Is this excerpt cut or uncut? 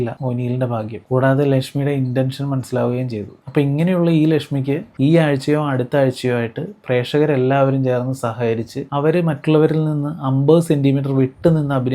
uncut